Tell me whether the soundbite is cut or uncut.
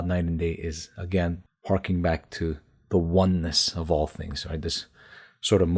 cut